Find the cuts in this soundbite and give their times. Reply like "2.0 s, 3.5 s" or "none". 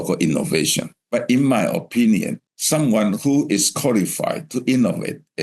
1.0 s, 2.4 s